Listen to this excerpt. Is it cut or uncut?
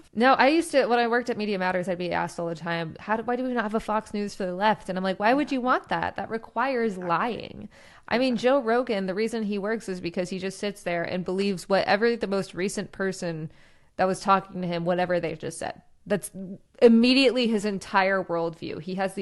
uncut